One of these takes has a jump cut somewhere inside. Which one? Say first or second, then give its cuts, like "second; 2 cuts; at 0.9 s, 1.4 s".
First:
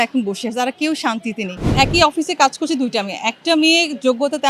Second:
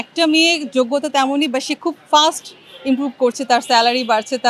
first; 1 cut; at 1.7 s